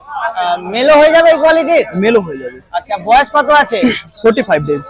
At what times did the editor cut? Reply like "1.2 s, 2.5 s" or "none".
none